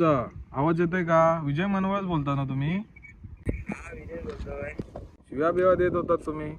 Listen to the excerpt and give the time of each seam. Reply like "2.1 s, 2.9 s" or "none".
4.9 s